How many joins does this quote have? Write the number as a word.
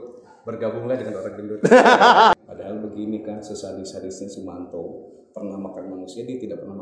one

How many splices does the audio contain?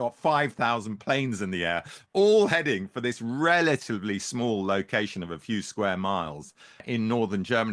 one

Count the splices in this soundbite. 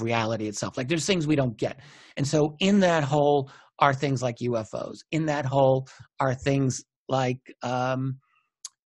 zero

